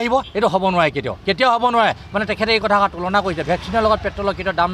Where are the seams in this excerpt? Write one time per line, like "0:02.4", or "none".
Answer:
none